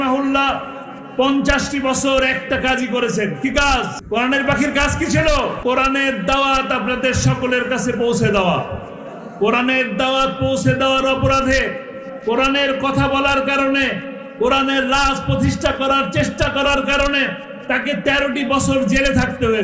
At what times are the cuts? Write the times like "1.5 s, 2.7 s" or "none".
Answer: 4.0 s, 5.6 s